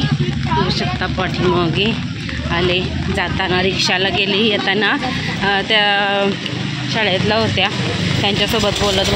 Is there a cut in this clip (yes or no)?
no